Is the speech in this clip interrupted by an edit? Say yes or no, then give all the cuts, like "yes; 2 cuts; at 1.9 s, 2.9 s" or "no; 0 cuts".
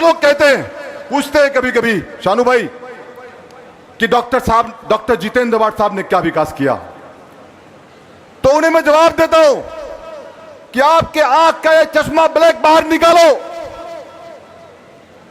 no; 0 cuts